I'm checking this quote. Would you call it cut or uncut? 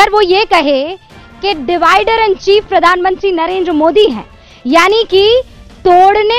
uncut